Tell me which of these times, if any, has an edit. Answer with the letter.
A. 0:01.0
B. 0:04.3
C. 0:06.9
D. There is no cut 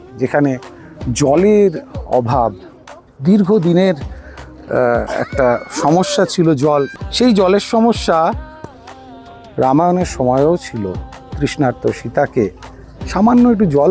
C